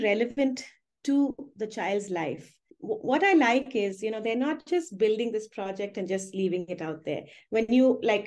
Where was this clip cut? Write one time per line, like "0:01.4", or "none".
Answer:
0:02.6